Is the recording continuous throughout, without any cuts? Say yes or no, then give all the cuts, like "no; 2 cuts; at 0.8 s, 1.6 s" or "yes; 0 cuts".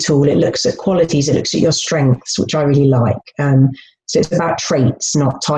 yes; 0 cuts